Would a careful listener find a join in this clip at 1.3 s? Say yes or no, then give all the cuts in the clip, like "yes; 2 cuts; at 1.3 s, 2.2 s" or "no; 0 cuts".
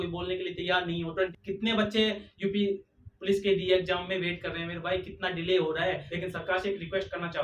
yes; 2 cuts; at 1.3 s, 6.1 s